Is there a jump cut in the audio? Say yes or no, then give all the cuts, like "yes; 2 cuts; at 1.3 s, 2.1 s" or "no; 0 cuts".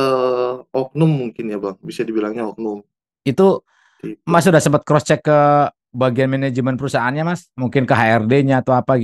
no; 0 cuts